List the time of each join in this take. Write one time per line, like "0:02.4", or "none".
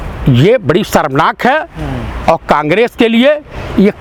none